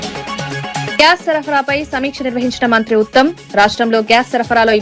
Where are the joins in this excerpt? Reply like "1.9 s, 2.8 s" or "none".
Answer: 0.9 s